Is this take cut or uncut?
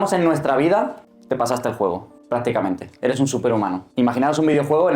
cut